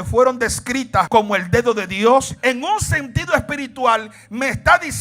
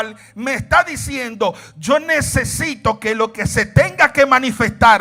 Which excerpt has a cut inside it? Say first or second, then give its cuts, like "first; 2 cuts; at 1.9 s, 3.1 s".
first; 2 cuts; at 1.1 s, 2.3 s